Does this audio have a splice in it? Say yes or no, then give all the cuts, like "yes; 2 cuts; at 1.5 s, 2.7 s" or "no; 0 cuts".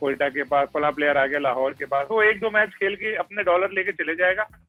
no; 0 cuts